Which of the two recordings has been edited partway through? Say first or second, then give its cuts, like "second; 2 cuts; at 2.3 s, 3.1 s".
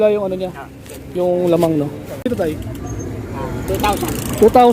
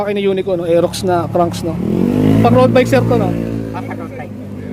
first; 1 cut; at 2.2 s